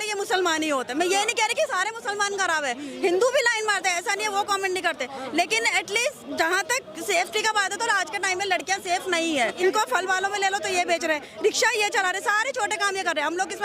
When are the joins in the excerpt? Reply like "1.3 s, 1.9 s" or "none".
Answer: 9.6 s